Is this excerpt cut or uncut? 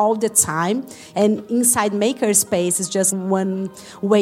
cut